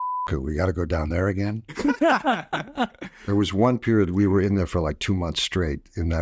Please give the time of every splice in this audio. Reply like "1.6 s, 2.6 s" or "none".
3.1 s